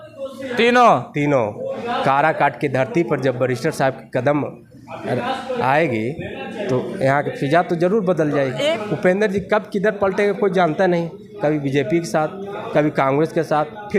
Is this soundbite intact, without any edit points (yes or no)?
no